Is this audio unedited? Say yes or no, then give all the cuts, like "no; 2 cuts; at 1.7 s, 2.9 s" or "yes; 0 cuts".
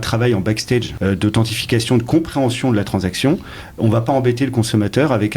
no; 1 cut; at 0.9 s